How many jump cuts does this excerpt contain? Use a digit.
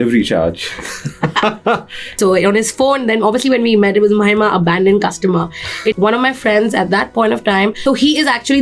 2